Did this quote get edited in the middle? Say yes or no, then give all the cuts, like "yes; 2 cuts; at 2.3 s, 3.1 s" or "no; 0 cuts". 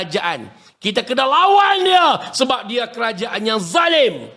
no; 0 cuts